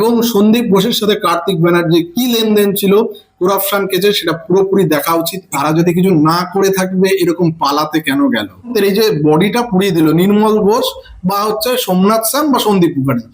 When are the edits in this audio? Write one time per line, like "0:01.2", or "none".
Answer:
0:05.5
0:08.7